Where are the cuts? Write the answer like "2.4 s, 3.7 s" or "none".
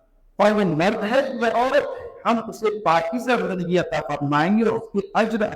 2.1 s